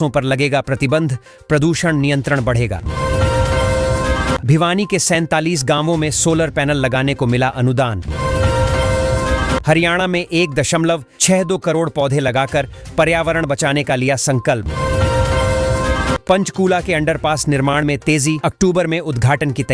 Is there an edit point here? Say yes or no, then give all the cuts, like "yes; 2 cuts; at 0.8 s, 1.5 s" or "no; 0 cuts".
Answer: no; 0 cuts